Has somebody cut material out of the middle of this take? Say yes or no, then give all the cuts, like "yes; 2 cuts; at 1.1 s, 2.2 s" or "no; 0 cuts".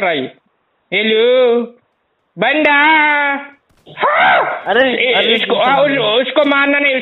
no; 0 cuts